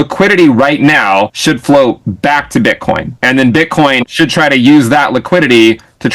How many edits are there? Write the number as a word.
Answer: three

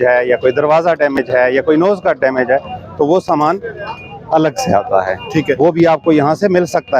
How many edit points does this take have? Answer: zero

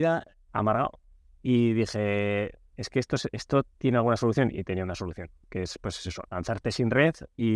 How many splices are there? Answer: zero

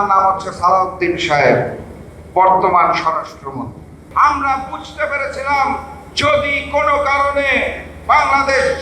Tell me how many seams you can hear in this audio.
one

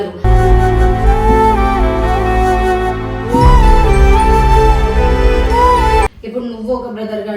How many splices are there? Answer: one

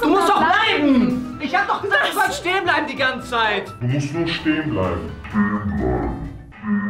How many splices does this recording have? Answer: one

